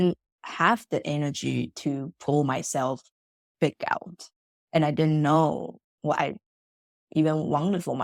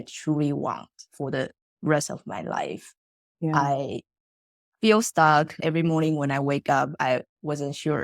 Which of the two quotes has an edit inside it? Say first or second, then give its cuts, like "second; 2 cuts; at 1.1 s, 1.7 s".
second; 1 cut; at 5.6 s